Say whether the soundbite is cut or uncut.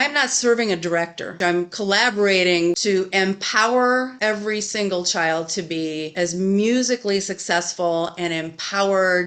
cut